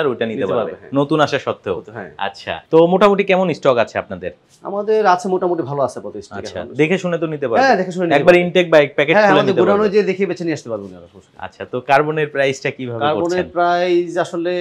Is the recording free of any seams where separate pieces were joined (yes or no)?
no